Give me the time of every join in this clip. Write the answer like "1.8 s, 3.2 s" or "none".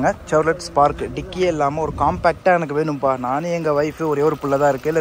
none